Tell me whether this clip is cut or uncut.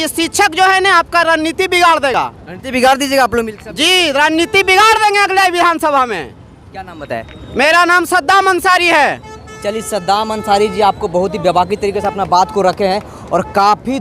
uncut